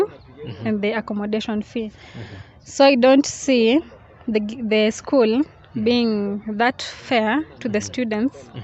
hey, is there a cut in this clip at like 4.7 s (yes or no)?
no